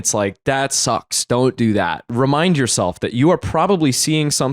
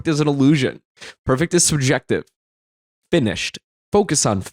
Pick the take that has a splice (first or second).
first